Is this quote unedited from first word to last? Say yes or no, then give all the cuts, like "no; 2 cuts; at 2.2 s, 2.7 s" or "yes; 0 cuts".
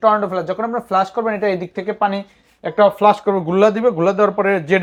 yes; 0 cuts